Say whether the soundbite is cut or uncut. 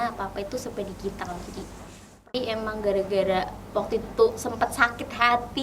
cut